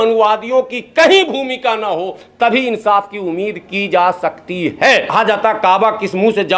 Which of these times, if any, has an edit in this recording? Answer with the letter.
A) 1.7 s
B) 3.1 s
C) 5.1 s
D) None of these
C